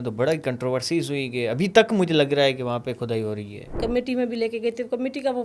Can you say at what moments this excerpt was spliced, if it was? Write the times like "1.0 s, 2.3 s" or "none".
3.8 s